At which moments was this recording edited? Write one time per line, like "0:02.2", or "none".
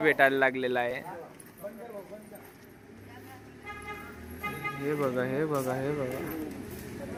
none